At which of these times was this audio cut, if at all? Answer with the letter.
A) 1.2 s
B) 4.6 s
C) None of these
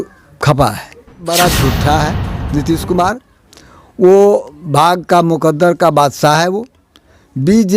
A